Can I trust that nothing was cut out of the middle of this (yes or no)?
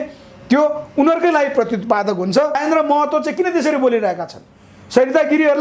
no